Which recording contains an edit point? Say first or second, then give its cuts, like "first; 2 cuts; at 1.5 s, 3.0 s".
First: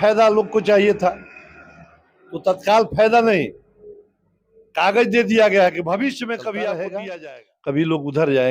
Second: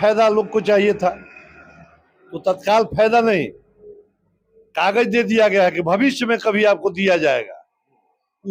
first; 1 cut; at 7.0 s